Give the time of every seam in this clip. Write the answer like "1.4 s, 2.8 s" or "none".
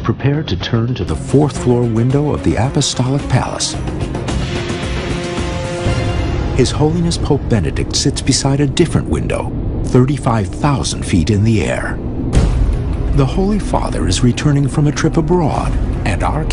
6.4 s